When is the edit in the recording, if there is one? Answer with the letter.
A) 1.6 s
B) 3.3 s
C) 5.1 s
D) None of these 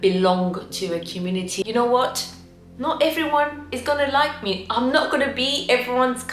A